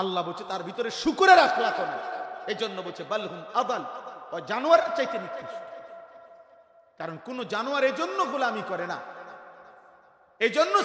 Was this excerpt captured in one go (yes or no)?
yes